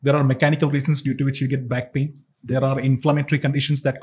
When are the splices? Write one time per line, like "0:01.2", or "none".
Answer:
none